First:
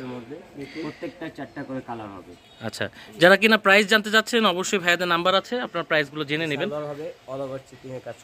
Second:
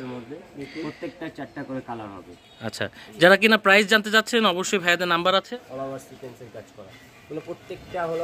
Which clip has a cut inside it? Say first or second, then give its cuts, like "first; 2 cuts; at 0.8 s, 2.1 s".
second; 1 cut; at 5.5 s